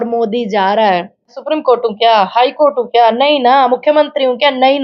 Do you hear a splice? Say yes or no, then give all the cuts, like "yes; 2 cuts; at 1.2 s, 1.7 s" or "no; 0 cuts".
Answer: yes; 1 cut; at 1.4 s